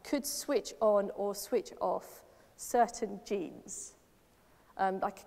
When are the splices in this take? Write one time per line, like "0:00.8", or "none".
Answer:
none